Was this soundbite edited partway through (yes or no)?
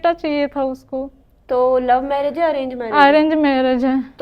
no